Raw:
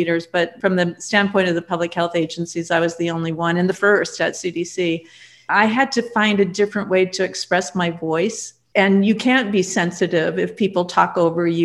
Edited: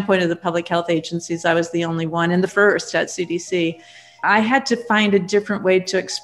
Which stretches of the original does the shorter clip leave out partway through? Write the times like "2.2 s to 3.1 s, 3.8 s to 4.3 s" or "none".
none